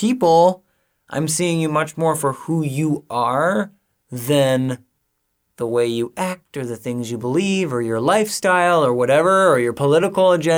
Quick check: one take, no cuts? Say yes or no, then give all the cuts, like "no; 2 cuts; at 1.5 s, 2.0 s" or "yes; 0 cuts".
yes; 0 cuts